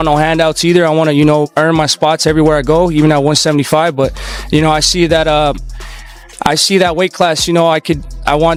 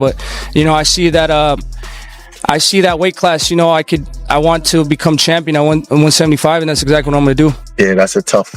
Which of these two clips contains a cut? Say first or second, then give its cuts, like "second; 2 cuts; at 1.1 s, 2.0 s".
second; 1 cut; at 7.3 s